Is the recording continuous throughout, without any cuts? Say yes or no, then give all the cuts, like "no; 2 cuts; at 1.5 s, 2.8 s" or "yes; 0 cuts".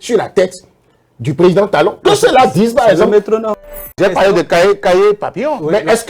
no; 1 cut; at 3.8 s